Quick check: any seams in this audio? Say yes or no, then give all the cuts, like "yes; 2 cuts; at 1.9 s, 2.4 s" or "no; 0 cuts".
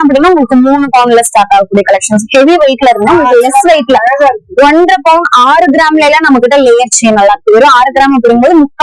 no; 0 cuts